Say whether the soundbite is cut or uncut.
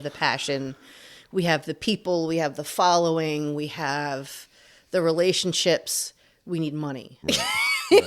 cut